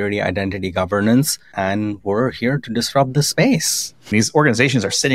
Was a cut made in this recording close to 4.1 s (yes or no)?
yes